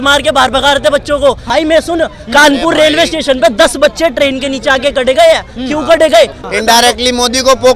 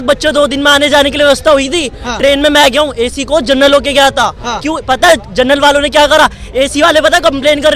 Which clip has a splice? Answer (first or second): first